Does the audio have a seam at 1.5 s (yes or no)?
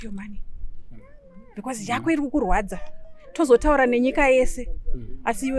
no